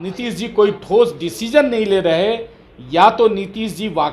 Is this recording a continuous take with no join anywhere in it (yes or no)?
yes